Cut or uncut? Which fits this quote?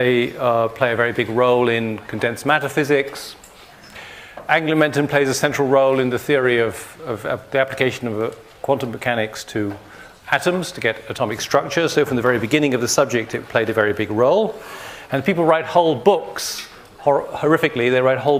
uncut